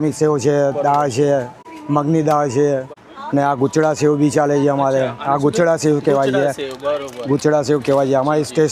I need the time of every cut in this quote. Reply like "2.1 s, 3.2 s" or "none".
none